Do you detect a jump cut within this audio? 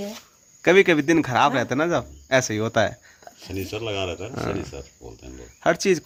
no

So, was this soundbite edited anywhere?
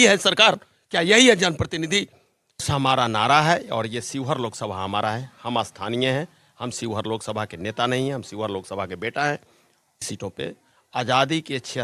yes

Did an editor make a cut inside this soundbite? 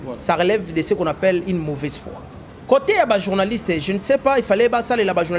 yes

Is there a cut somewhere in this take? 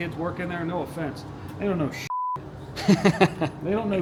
no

